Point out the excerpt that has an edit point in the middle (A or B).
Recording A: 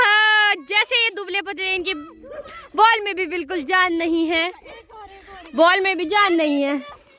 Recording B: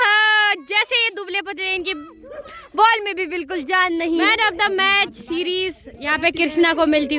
B